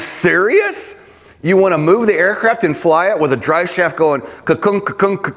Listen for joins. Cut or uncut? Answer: uncut